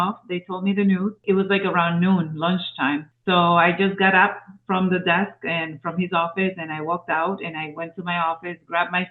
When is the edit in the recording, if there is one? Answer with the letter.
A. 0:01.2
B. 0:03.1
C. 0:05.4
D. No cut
B